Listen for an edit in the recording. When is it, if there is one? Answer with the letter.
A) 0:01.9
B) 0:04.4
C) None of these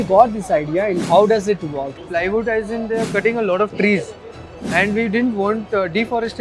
A